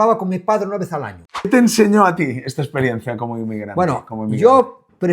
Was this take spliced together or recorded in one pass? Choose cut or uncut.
cut